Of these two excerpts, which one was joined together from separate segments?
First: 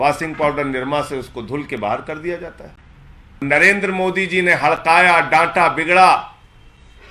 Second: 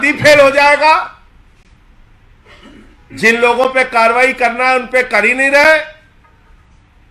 first; 1 cut; at 3.4 s

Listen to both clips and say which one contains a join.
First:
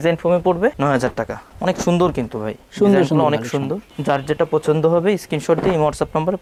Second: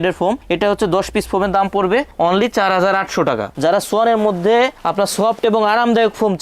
second; 1 cut; at 3.5 s

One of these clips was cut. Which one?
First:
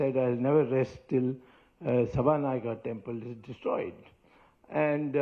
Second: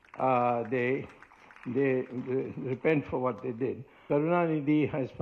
second; 1 cut; at 3.9 s

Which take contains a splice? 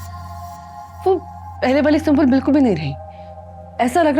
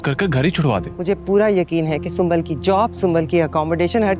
second; 1 cut; at 0.9 s

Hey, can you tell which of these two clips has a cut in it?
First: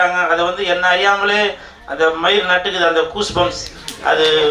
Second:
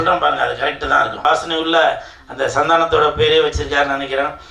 second; 1 cut; at 1.2 s

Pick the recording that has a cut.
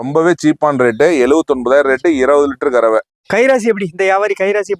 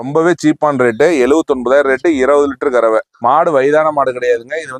first; 1 cut; at 3.1 s

